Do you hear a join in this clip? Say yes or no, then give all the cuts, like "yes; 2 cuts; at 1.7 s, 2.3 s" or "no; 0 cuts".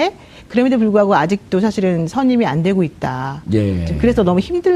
no; 0 cuts